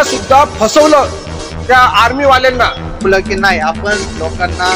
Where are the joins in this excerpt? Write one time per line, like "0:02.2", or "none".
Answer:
0:03.1